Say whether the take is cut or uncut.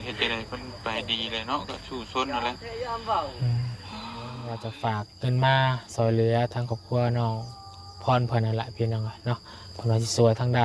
cut